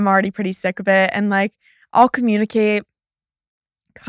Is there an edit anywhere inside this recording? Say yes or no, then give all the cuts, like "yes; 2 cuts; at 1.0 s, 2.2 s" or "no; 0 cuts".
no; 0 cuts